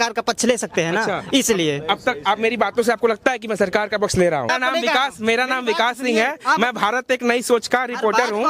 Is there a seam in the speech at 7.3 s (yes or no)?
no